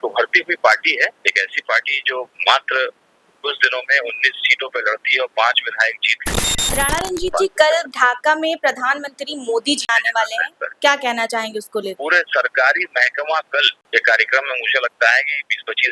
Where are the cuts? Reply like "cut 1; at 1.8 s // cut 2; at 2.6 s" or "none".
cut 1; at 6.8 s // cut 2; at 9.8 s // cut 3; at 12.0 s // cut 4; at 13.8 s